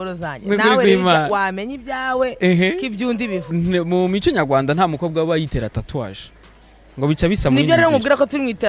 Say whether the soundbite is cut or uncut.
cut